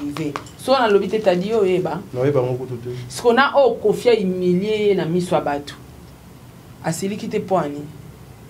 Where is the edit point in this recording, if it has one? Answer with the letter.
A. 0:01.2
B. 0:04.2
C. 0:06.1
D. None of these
D